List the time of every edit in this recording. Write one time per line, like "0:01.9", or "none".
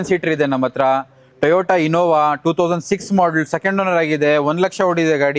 none